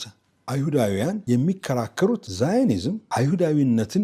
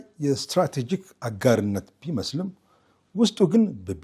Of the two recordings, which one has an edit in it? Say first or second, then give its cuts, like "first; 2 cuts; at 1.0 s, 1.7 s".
first; 3 cuts; at 1.2 s, 2.3 s, 3.0 s